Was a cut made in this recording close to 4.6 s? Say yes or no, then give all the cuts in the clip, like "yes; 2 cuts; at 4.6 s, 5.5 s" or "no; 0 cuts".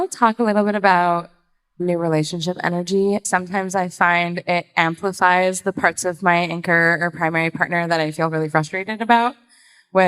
no; 2 cuts; at 1.8 s, 3.3 s